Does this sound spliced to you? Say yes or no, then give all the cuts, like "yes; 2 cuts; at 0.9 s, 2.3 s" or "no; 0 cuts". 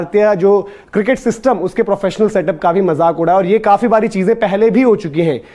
no; 0 cuts